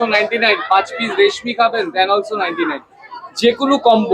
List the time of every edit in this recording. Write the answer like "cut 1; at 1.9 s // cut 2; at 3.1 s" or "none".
none